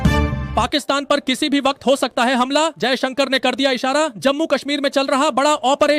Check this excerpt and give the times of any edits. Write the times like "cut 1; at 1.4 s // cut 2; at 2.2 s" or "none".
cut 1; at 2.6 s